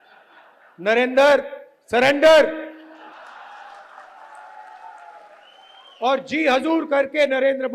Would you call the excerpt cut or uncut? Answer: cut